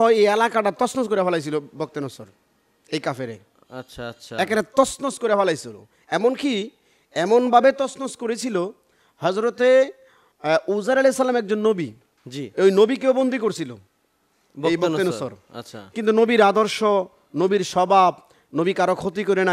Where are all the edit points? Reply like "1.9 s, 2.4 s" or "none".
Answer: none